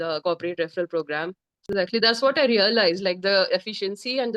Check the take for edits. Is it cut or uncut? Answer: cut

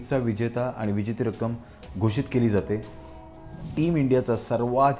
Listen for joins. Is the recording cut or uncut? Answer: cut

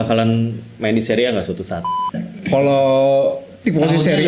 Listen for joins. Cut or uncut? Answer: cut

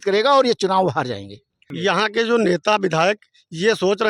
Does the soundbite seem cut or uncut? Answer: cut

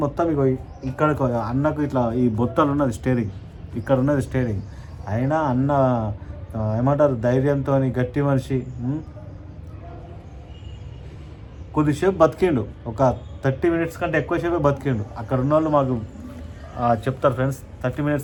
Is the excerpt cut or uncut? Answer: uncut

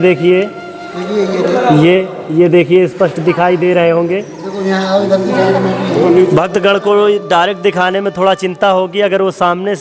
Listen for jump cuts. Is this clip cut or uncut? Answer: uncut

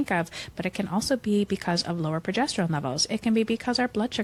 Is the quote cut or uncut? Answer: uncut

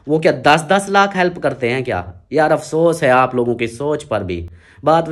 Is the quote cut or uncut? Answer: uncut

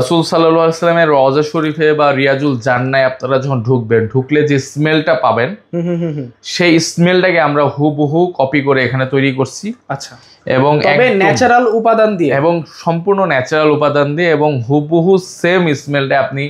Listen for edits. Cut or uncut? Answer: uncut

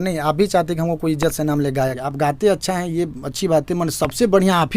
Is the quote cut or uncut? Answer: cut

